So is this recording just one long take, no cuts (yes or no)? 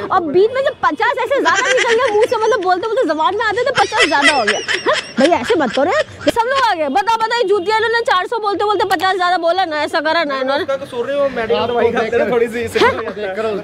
yes